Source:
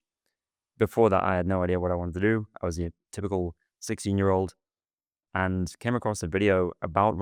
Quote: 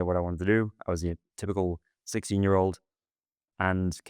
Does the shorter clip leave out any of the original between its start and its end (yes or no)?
no